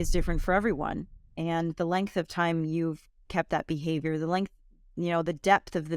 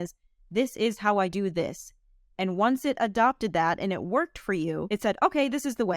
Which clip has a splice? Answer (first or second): second